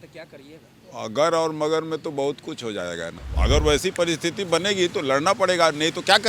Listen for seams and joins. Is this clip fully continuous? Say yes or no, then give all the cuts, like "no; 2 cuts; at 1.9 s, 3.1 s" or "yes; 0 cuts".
no; 1 cut; at 3.2 s